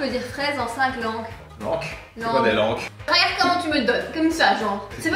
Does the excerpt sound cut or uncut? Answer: cut